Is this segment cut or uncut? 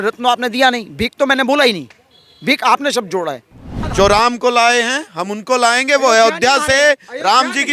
cut